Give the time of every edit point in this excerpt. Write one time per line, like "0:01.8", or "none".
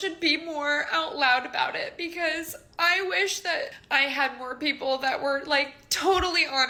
none